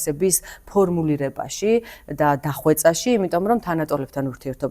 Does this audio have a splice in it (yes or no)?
no